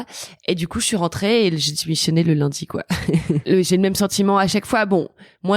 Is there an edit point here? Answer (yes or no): yes